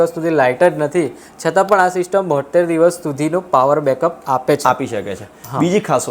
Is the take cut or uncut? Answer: uncut